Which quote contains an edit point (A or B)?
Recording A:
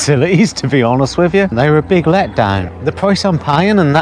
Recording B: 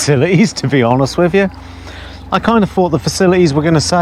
A